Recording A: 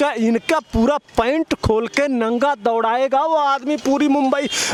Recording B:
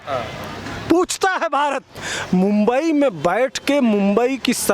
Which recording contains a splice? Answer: B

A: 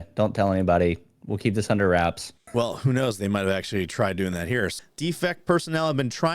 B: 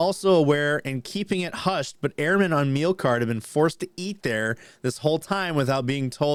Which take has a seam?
A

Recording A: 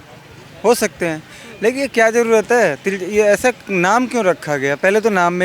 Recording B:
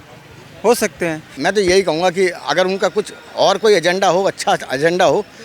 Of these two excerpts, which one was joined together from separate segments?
B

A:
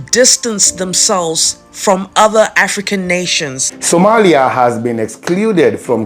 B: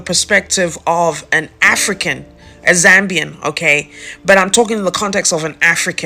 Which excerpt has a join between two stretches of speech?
A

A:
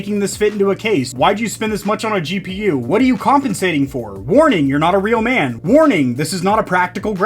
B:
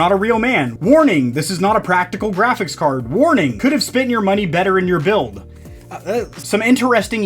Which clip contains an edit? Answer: A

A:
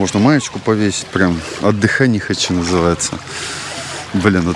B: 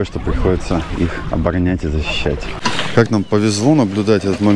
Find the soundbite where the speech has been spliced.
B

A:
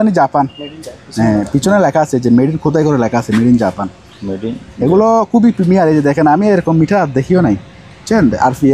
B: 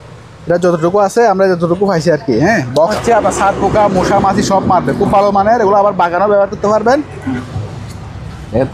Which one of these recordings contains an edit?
B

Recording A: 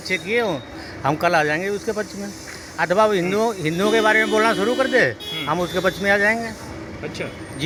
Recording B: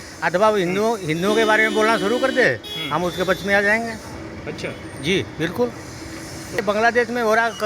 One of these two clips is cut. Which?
B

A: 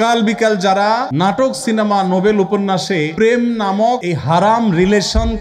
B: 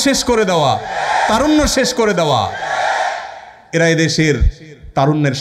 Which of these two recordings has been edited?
A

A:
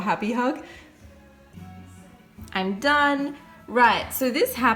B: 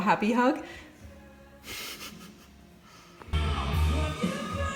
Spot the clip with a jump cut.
A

